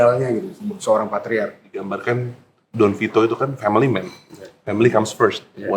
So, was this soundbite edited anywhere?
yes; 1 cut; at 2.0 s

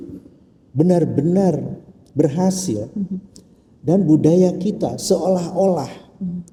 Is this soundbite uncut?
yes; 0 cuts

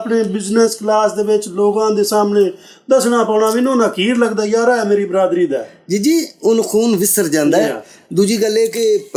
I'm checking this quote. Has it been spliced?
no; 0 cuts

